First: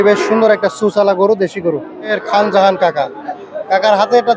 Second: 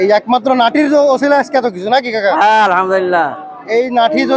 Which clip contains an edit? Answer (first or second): first